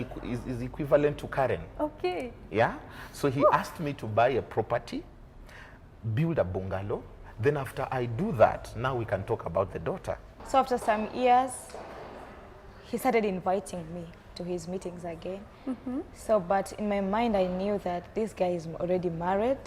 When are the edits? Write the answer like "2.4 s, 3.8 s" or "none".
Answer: 10.3 s